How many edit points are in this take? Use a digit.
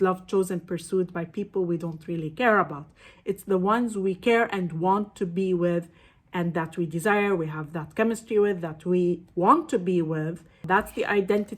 1